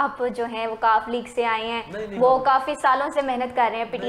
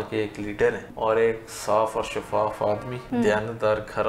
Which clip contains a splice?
second; 2 cuts; at 0.9 s, 2.9 s

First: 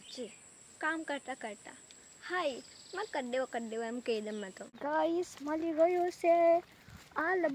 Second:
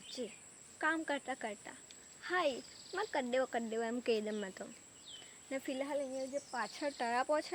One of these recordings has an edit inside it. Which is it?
first; 1 cut; at 4.8 s

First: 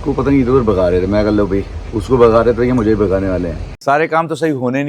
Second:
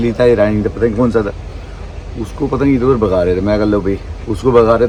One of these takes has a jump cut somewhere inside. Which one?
first; 1 cut; at 3.7 s

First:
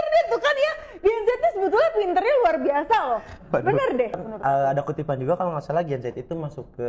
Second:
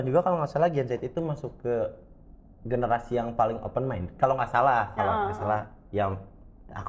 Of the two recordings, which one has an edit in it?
first; 1 cut; at 4.2 s

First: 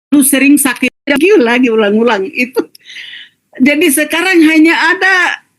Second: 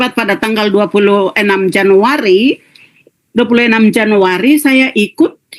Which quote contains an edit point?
first; 1 cut; at 1.0 s

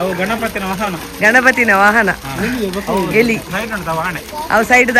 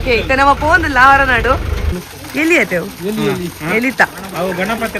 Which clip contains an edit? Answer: second; 1 cut; at 1.9 s

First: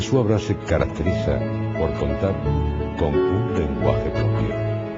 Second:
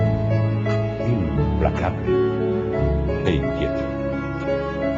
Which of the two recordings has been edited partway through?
second; 1 cut; at 1.3 s

